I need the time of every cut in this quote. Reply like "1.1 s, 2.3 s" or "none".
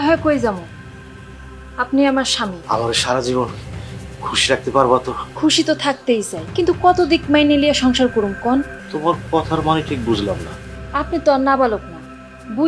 2.6 s, 5.2 s, 6.4 s, 8.8 s

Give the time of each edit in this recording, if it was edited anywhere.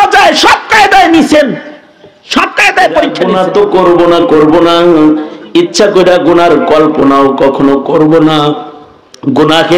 3.2 s

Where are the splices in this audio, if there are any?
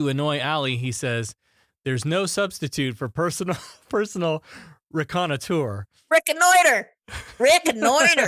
none

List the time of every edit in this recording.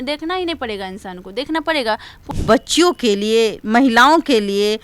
2.1 s

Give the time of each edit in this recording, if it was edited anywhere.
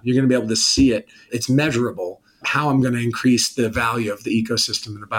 1.3 s, 2.5 s

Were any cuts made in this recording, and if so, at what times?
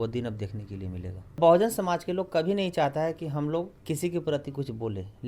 1.4 s, 3.8 s

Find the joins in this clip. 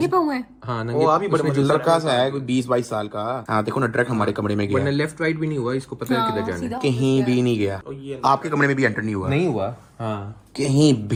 none

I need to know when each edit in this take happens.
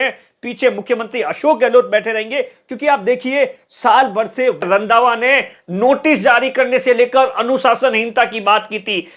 4.6 s

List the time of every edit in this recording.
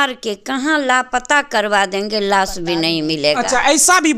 none

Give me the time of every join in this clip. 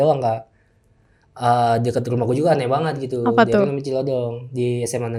none

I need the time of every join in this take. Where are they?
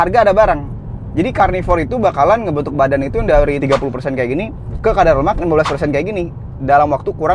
none

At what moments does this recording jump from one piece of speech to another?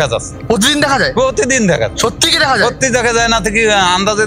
none

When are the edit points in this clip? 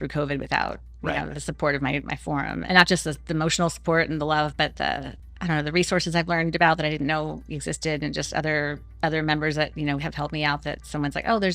2.6 s, 5.2 s

